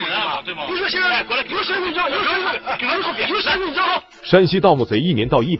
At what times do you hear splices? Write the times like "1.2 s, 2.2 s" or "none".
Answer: 4.1 s